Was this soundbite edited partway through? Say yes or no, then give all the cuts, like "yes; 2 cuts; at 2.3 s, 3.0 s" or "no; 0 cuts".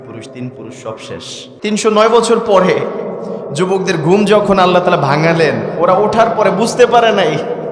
yes; 1 cut; at 1.6 s